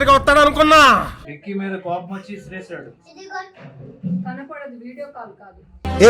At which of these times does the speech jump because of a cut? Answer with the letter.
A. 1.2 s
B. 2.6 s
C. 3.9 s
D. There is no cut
A